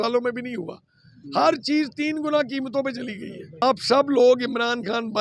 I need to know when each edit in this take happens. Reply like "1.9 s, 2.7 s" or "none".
3.6 s